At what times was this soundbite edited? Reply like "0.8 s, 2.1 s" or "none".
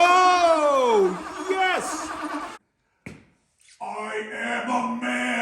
2.5 s